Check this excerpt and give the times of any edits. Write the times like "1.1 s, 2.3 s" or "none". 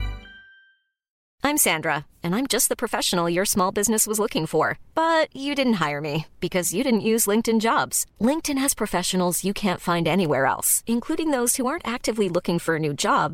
1.2 s

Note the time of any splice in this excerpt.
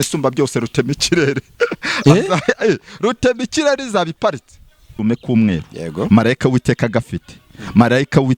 4.9 s

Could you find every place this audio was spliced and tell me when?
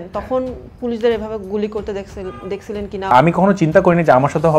3.1 s

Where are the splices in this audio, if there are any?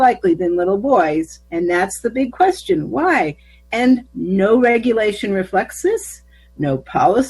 1.4 s, 4.1 s

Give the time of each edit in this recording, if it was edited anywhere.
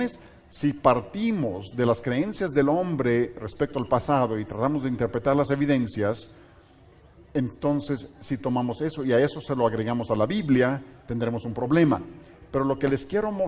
6.7 s

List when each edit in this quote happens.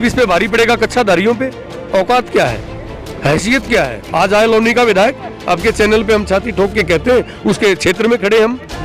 4.0 s

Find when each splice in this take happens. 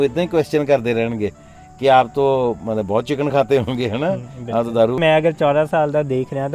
5.0 s

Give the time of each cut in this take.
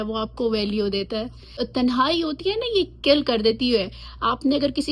1.6 s

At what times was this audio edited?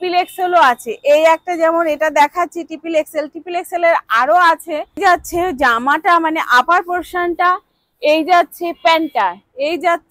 4.8 s

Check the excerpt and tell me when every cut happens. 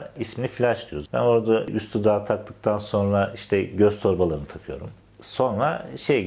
1.0 s

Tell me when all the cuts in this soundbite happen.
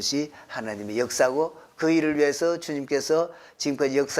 none

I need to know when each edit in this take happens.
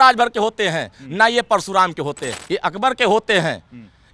2.3 s

